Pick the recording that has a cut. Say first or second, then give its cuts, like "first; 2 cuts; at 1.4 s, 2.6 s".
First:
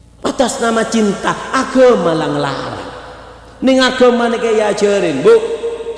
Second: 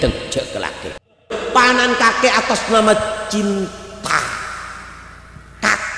second; 1 cut; at 1.4 s